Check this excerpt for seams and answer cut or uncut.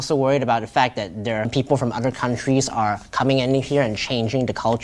cut